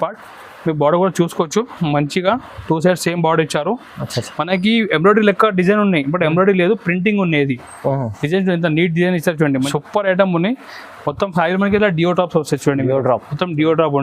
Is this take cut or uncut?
cut